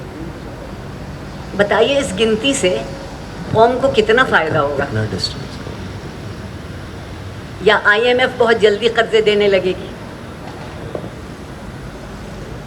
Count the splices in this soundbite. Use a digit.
0